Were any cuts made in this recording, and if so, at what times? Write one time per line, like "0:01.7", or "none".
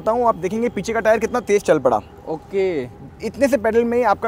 none